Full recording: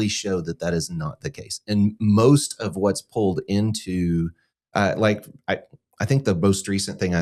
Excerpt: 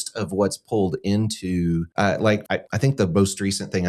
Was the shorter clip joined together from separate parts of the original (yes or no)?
yes